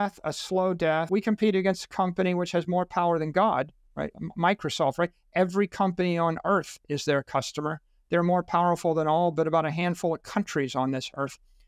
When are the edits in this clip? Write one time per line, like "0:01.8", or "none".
0:01.1